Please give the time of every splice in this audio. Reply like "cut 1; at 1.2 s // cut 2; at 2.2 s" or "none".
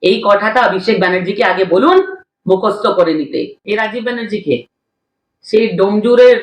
cut 1; at 3.6 s

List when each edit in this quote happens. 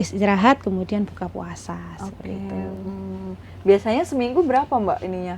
none

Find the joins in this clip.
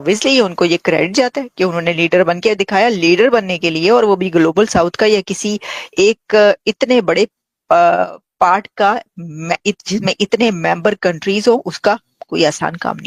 none

